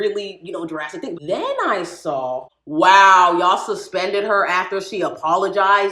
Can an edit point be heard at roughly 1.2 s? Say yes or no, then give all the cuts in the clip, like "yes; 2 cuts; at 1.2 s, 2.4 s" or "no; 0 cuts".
yes; 2 cuts; at 1.2 s, 2.5 s